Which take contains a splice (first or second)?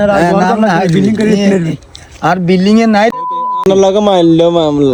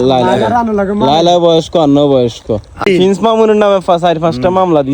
second